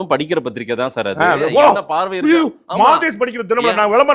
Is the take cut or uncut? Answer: uncut